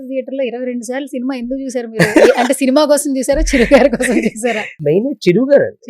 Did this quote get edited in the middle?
yes; 1 cut; at 4.8 s

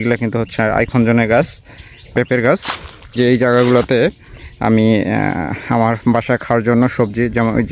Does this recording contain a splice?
yes; 2 cuts; at 2.0 s, 3.1 s

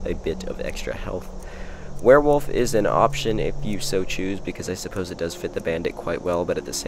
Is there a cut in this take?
yes; 1 cut; at 1.4 s

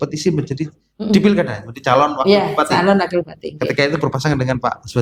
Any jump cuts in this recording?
no; 0 cuts

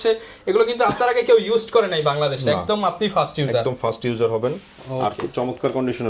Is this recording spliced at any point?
no; 0 cuts

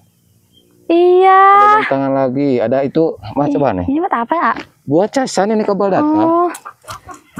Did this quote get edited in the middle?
no; 0 cuts

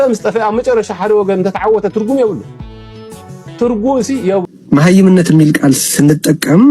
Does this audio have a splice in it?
yes; 1 cut; at 4.4 s

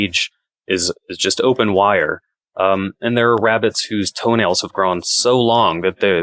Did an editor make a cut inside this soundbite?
no; 0 cuts

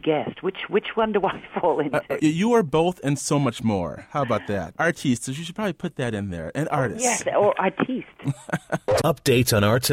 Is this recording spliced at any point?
yes; 3 cuts; at 2.1 s, 4.8 s, 8.9 s

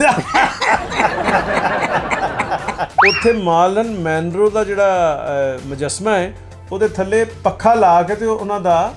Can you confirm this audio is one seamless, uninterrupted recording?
no; 1 cut; at 2.9 s

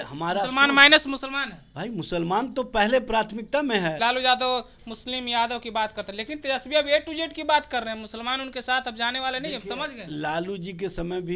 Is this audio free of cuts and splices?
no; 1 cut; at 4.0 s

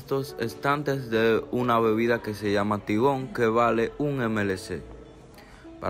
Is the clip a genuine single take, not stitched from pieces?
yes; 0 cuts

